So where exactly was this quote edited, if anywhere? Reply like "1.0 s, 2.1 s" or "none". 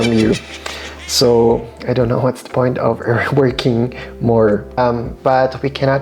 4.8 s